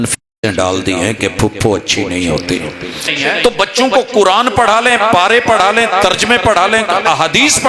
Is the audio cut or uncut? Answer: cut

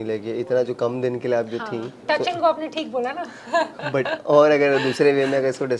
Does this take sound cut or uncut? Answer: uncut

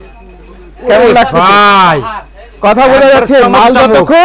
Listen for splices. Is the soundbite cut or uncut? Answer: uncut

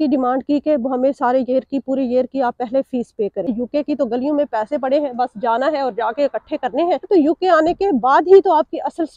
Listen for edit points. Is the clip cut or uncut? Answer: cut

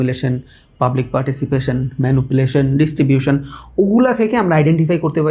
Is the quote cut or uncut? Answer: uncut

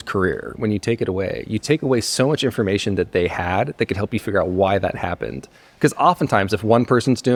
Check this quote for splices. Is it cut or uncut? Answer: uncut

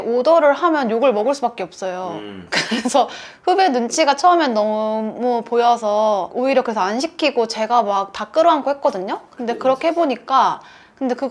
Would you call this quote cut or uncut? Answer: cut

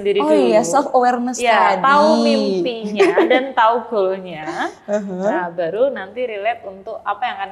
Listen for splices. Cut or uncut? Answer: uncut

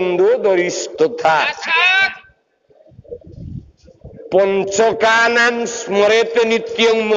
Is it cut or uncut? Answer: uncut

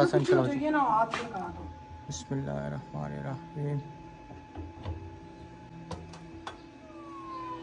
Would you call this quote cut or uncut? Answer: uncut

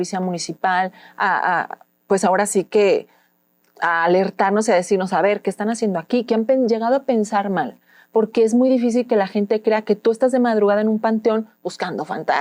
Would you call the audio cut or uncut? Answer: uncut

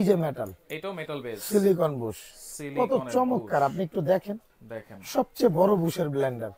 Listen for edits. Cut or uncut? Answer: uncut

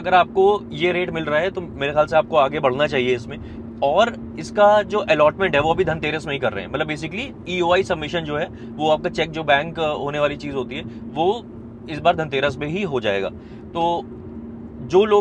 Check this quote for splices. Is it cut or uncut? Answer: uncut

